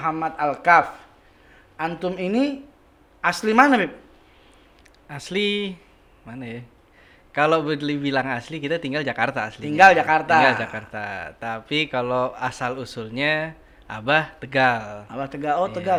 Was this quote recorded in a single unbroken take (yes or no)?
yes